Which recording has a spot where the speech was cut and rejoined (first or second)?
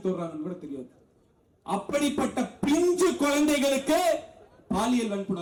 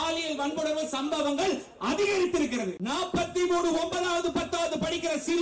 second